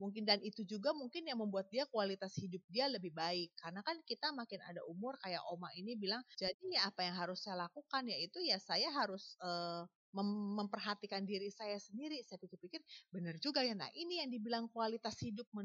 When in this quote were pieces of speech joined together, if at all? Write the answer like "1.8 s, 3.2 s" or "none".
6.3 s